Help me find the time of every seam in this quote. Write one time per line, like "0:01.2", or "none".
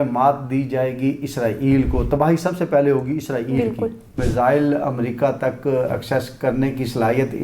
0:04.1